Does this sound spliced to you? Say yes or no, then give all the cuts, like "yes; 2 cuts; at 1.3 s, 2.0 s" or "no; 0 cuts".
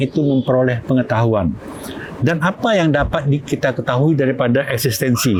no; 0 cuts